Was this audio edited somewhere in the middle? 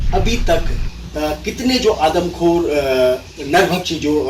no; 0 cuts

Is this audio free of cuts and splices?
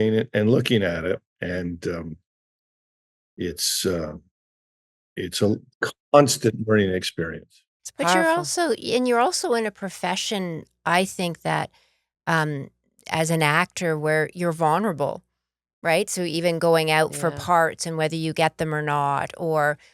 yes; 0 cuts

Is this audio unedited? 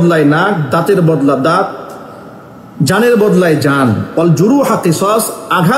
yes; 0 cuts

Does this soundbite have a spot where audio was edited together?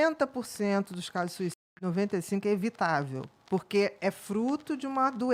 no; 0 cuts

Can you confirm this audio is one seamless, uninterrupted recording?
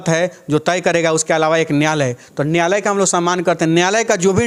yes; 0 cuts

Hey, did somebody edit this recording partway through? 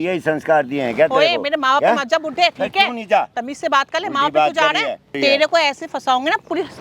yes; 1 cut; at 5.1 s

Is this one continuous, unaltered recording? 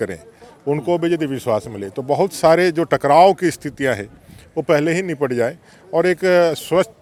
yes; 0 cuts

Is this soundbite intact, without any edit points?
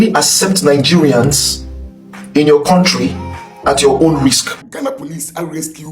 no; 1 cut; at 4.6 s

